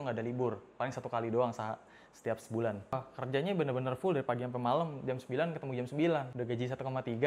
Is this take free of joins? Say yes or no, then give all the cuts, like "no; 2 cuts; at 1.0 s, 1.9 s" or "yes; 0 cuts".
no; 2 cuts; at 2.9 s, 6.3 s